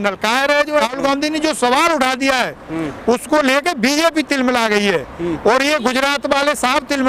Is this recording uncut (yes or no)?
no